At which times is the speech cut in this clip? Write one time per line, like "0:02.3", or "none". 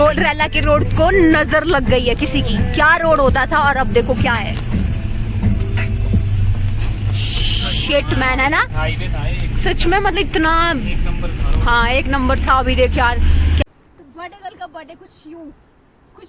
0:13.6